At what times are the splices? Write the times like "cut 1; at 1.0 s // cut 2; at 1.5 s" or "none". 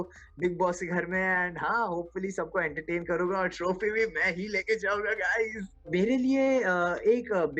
cut 1; at 5.9 s